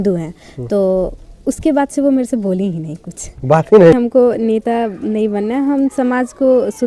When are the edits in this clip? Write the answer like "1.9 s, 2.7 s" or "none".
4.3 s